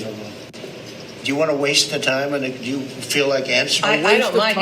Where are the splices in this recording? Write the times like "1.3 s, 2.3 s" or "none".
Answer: 2.5 s